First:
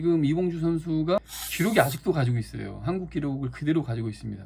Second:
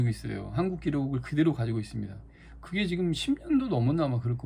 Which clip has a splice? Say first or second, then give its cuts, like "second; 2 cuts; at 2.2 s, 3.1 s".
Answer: first; 1 cut; at 1.2 s